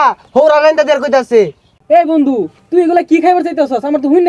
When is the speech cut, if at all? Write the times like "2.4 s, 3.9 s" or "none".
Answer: none